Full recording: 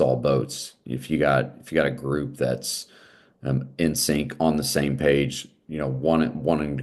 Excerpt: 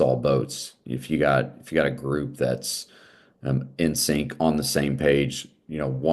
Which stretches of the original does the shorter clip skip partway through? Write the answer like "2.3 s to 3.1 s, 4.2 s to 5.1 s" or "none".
none